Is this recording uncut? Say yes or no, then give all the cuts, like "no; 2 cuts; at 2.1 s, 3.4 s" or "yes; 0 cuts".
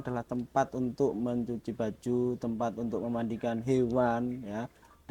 yes; 0 cuts